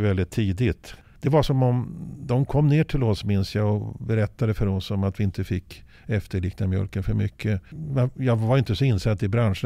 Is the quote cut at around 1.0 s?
yes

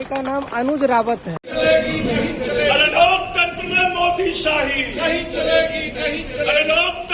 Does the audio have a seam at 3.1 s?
no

